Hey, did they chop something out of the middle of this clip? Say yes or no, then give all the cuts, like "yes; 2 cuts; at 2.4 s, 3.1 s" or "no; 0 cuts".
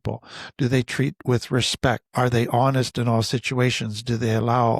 yes; 1 cut; at 2.0 s